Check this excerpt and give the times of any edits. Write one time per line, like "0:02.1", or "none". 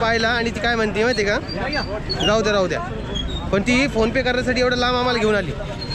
none

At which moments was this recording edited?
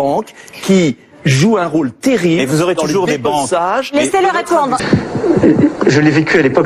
0:04.8

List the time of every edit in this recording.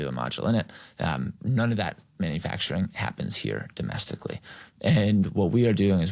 0:01.4

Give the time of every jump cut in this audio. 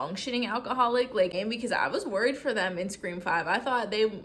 0:01.3

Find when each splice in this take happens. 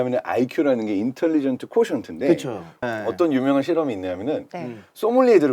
0:02.8

